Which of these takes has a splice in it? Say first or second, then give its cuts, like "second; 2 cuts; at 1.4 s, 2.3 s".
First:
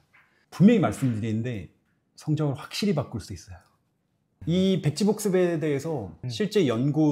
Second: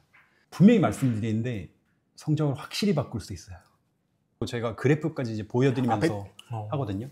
second; 1 cut; at 4.4 s